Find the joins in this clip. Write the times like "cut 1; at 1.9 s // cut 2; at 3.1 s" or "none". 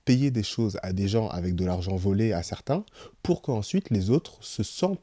none

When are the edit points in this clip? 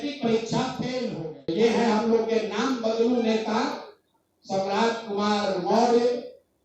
cut 1; at 1.1 s

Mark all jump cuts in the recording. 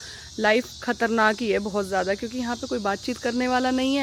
none

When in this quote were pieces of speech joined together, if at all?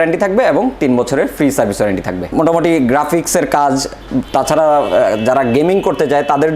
cut 1; at 2.2 s

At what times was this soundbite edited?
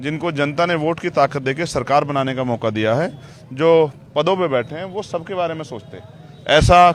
none

